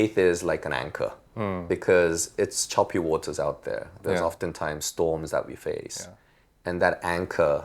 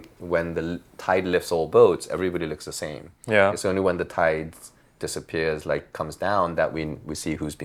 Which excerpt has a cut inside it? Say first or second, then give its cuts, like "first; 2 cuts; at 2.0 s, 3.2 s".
first; 1 cut; at 1.6 s